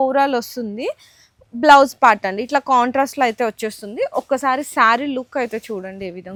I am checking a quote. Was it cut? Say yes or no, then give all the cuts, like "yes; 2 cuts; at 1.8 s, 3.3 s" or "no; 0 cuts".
no; 0 cuts